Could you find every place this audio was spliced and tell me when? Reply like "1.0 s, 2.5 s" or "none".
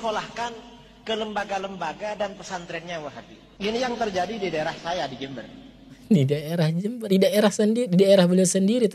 3.7 s

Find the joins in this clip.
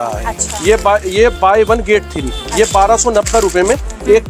none

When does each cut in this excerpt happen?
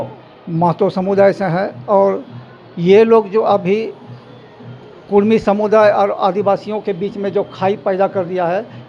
none

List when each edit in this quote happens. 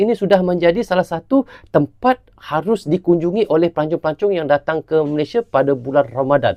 none

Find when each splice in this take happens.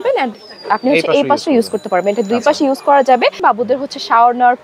3.4 s

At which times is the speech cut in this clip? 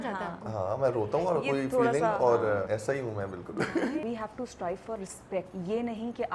2.7 s, 4.0 s, 5.5 s

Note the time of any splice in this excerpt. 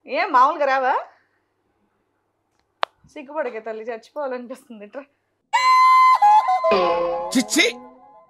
none

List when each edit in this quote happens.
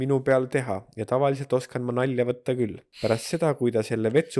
2.8 s

